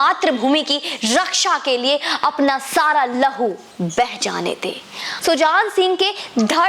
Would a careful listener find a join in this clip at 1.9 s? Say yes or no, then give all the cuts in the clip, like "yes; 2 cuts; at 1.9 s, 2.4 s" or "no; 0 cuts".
no; 1 cut; at 5.0 s